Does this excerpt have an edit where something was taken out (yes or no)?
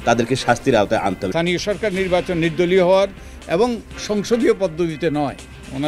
yes